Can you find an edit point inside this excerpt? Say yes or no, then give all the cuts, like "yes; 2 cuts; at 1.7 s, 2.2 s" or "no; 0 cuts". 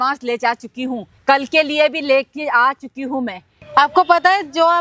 yes; 2 cuts; at 1.1 s, 3.5 s